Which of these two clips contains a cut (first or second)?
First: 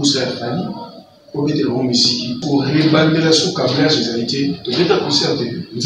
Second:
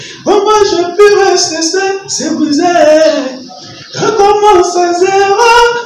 first